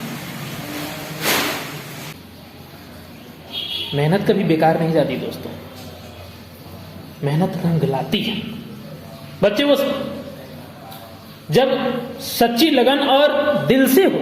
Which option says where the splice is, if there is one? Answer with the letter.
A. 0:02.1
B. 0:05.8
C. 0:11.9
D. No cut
A